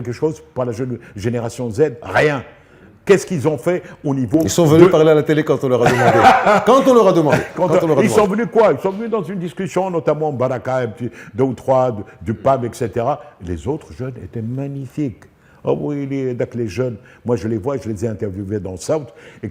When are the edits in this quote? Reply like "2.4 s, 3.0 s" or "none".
none